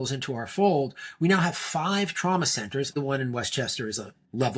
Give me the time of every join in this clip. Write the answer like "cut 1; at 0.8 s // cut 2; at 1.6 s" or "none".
cut 1; at 2.9 s